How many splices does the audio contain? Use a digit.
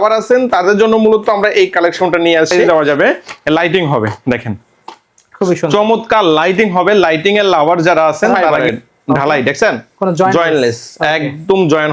2